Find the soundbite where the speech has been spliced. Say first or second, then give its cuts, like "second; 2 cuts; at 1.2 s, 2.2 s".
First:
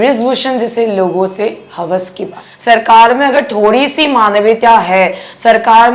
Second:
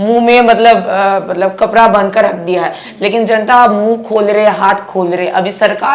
first; 1 cut; at 2.5 s